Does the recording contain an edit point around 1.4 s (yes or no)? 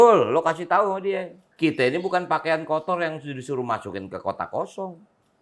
yes